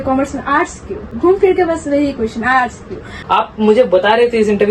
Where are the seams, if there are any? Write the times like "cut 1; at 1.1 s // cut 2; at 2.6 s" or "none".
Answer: cut 1; at 1.2 s // cut 2; at 3.1 s